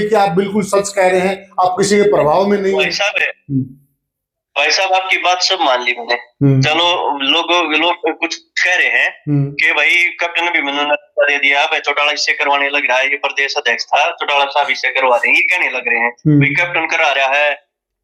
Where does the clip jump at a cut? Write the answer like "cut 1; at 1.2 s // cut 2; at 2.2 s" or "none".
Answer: none